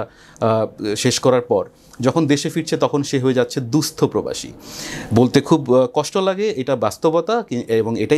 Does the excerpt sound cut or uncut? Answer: uncut